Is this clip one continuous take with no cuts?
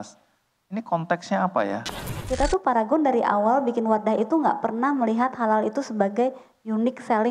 no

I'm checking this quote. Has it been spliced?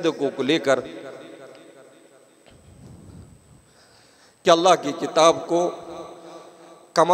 no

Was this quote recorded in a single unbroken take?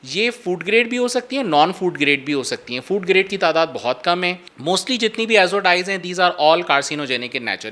no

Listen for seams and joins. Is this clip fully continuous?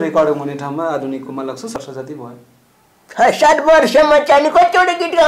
no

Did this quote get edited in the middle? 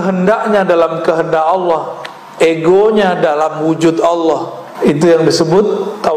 yes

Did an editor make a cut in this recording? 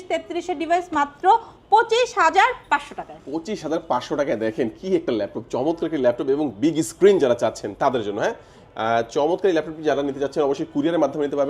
no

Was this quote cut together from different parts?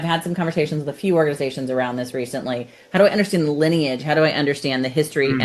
no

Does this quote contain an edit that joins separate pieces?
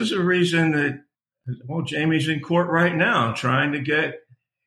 yes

